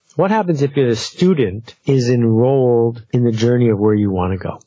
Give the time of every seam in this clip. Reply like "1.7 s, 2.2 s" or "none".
1.7 s, 3.0 s